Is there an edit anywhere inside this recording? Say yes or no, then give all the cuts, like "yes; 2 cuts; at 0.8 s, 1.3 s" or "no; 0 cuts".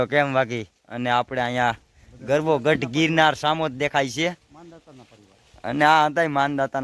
no; 0 cuts